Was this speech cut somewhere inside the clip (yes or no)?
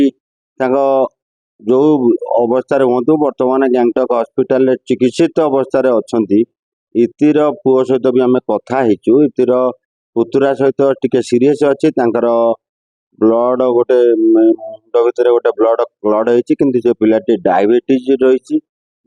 no